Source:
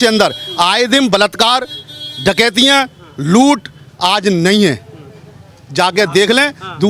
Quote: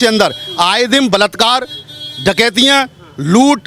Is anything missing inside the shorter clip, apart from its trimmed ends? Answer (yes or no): no